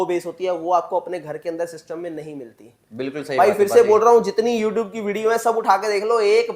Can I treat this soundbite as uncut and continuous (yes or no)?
yes